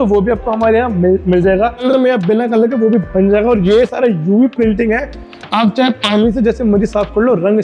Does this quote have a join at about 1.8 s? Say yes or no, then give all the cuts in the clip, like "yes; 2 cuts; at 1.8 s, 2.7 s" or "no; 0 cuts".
yes; 1 cut; at 1.8 s